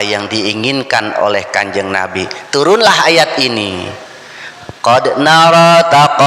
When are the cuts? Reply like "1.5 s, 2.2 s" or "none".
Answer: none